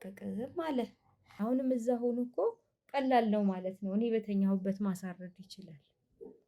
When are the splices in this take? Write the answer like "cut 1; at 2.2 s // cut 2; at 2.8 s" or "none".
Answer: cut 1; at 1.2 s